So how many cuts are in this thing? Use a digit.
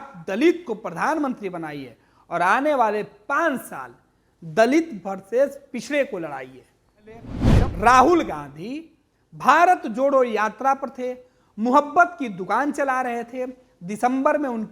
1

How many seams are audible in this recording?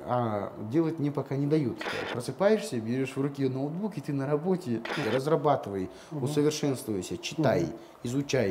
2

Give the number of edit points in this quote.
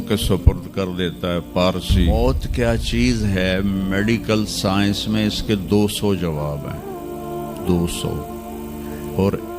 1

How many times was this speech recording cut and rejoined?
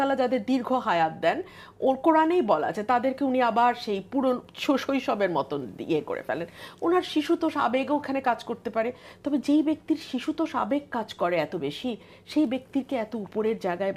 0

